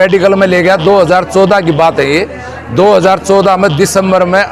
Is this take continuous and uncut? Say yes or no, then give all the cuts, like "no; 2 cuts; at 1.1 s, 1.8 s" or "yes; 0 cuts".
yes; 0 cuts